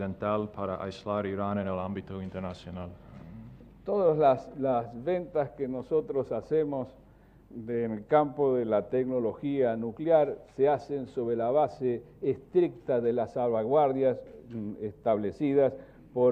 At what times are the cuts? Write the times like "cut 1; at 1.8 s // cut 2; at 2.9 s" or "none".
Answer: cut 1; at 6.0 s